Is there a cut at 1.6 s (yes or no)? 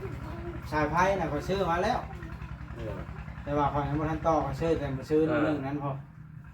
no